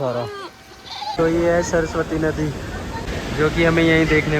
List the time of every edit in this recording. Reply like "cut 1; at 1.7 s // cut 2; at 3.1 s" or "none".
cut 1; at 1.2 s // cut 2; at 3.1 s